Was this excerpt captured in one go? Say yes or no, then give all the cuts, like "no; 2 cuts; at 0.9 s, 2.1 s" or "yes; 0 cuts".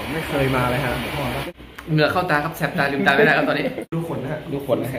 no; 2 cuts; at 1.4 s, 3.9 s